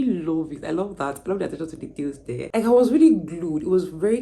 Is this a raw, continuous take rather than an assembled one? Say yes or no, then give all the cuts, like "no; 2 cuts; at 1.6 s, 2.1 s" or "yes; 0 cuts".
no; 1 cut; at 2.5 s